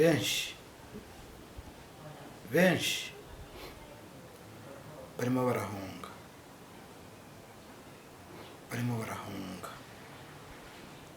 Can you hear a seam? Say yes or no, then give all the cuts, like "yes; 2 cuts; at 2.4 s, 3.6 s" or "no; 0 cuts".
no; 0 cuts